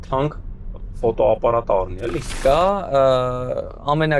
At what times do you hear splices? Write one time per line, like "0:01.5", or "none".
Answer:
0:02.4